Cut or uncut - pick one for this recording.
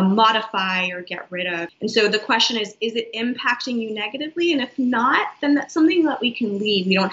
cut